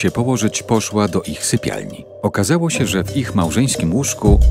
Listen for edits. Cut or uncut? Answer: uncut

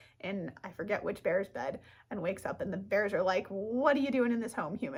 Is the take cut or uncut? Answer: uncut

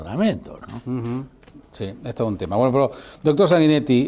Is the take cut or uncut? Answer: uncut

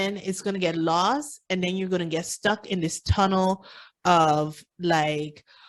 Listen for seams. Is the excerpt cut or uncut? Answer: uncut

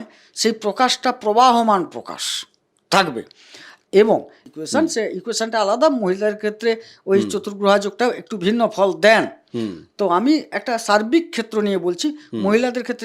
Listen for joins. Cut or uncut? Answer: cut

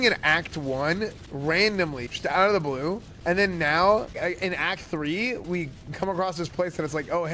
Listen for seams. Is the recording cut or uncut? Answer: cut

